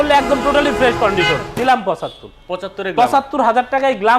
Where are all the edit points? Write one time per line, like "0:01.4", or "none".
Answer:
0:01.5